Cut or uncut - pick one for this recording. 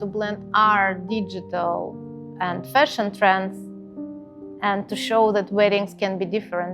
uncut